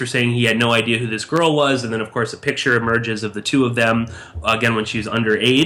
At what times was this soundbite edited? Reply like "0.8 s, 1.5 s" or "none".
none